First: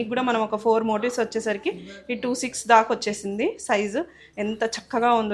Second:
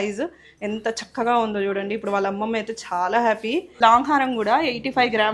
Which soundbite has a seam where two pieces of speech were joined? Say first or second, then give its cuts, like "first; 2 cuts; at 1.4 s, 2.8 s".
second; 1 cut; at 3.7 s